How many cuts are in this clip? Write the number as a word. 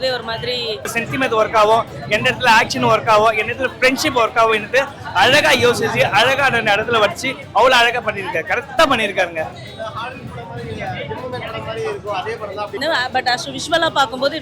two